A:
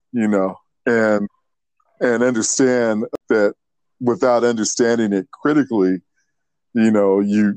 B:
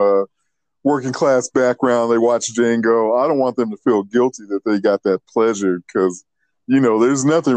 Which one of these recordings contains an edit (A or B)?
A